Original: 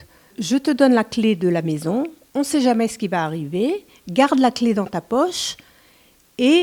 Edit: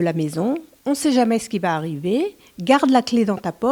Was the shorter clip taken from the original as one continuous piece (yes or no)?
yes